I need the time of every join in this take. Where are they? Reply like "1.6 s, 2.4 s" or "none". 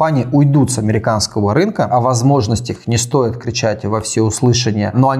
1.9 s